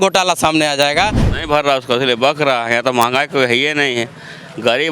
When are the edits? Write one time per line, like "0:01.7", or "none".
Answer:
0:01.3